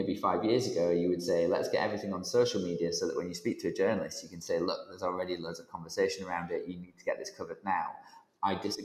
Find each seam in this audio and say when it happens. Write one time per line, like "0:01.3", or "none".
none